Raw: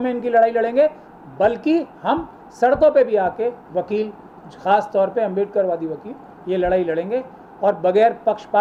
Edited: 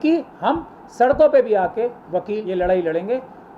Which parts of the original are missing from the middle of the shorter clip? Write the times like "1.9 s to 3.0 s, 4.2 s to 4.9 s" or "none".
4.0 s to 6.4 s